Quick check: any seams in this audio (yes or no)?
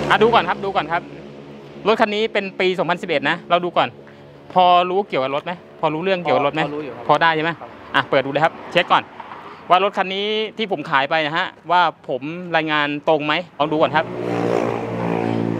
yes